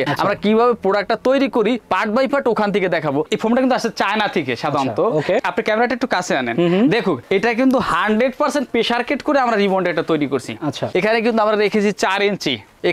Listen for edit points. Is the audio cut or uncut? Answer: cut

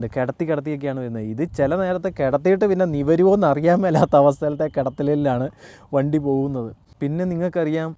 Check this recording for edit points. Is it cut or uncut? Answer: uncut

